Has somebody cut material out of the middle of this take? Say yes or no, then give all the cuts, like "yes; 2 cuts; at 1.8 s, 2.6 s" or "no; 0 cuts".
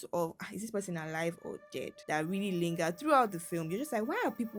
no; 0 cuts